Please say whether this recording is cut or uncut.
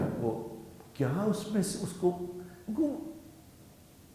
uncut